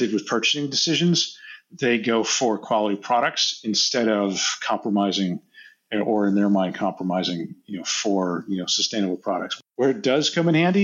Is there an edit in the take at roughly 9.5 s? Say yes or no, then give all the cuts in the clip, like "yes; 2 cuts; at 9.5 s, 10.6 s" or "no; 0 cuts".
yes; 1 cut; at 9.5 s